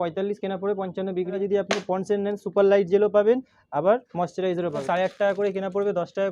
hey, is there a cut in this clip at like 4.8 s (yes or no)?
yes